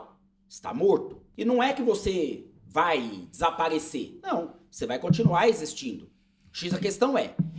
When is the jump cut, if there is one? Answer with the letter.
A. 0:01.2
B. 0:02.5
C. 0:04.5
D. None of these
A